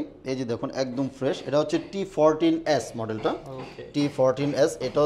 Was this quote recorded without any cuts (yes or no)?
yes